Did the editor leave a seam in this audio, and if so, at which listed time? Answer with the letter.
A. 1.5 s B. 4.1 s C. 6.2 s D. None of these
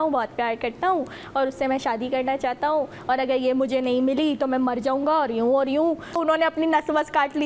C